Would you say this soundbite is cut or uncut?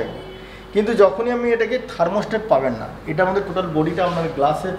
uncut